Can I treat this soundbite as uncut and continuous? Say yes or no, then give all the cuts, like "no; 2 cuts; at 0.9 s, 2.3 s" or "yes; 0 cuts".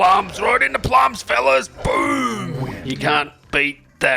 yes; 0 cuts